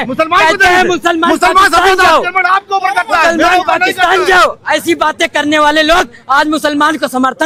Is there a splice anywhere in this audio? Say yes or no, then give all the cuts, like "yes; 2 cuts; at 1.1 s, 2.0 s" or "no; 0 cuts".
no; 0 cuts